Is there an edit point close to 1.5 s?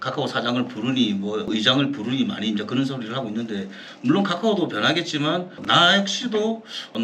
yes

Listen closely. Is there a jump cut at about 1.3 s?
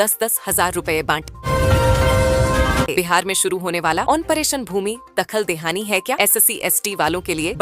yes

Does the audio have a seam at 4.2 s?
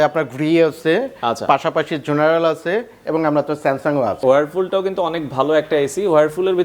yes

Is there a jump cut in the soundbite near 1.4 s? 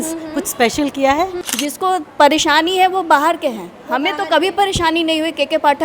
yes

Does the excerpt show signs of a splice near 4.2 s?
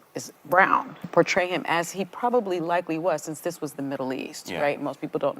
no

